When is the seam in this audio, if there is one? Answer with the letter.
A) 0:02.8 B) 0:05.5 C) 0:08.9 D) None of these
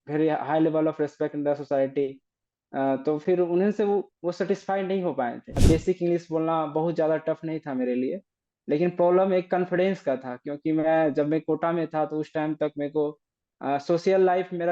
B